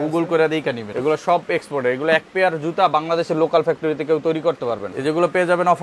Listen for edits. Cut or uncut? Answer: cut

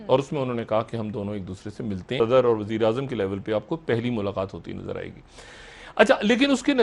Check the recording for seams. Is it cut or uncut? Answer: cut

